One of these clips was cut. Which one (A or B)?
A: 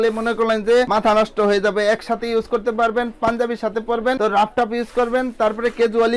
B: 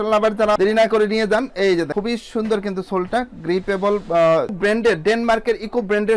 B